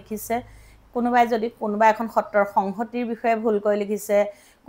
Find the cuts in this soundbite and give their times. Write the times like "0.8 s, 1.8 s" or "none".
none